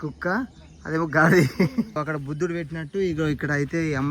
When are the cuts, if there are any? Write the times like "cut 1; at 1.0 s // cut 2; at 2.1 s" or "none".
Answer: cut 1; at 1.9 s